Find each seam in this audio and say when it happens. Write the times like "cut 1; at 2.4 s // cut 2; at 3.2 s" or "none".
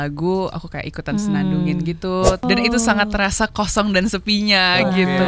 cut 1; at 2.4 s